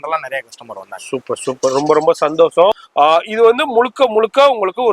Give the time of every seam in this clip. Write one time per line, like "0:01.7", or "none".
0:02.8